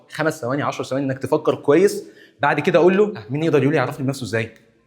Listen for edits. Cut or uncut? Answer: cut